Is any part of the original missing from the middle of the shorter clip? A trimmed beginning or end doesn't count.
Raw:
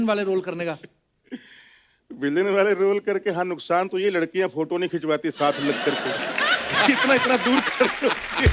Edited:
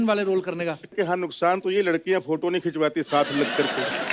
yes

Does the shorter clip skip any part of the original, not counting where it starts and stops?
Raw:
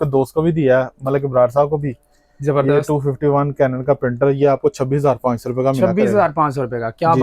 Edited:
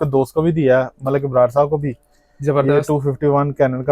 no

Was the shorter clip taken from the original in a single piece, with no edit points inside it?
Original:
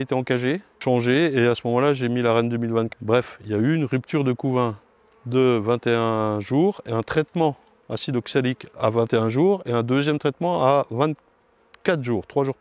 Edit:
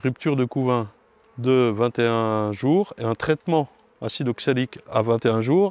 yes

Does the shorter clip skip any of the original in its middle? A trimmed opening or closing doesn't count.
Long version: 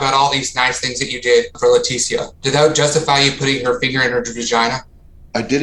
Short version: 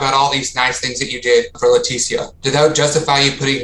no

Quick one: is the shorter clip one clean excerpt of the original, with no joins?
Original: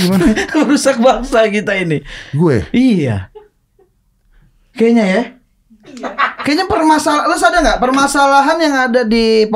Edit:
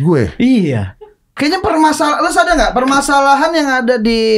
no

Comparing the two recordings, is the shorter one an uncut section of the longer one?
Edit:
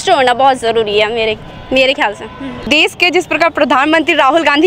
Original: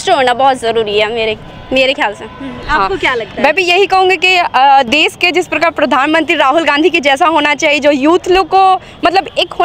no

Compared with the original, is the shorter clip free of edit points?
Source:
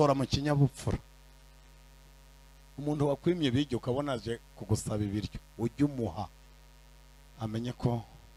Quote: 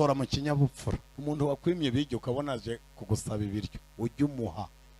no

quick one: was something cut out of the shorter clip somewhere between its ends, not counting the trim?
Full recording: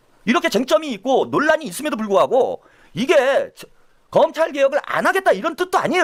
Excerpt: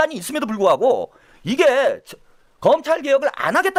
no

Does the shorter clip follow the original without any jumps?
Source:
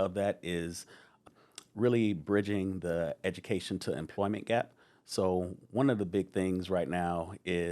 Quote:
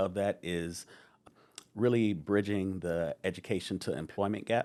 yes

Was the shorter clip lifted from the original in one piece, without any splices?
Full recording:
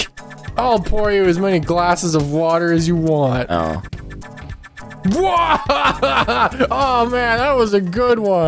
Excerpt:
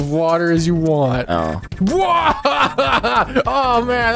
no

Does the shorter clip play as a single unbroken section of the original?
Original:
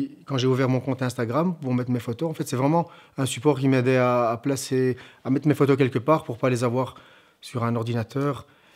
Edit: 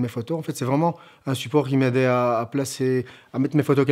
yes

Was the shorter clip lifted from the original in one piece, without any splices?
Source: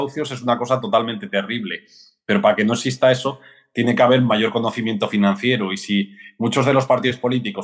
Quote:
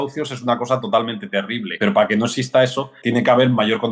no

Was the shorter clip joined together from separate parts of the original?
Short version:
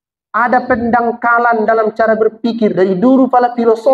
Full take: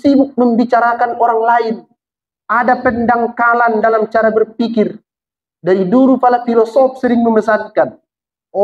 yes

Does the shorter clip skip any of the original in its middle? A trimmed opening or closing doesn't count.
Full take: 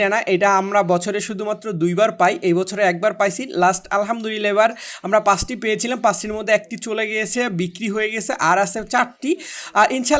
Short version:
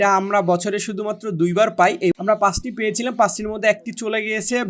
yes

